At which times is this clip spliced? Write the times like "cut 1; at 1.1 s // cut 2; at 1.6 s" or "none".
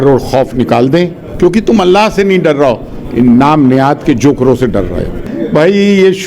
cut 1; at 5.3 s

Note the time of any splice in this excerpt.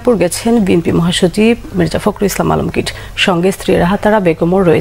none

